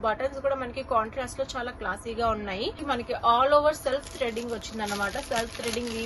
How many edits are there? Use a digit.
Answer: 1